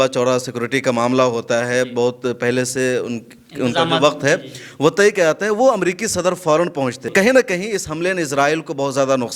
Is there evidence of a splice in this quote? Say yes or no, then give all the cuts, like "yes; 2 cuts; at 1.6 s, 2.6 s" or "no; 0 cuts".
yes; 1 cut; at 7.1 s